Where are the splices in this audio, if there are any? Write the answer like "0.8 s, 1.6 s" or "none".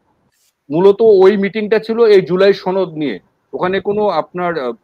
none